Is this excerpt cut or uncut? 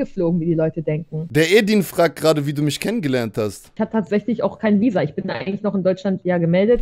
cut